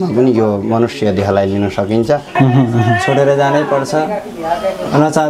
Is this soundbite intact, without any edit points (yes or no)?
no